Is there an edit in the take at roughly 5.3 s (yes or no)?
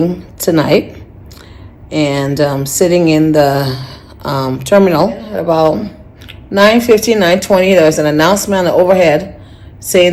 yes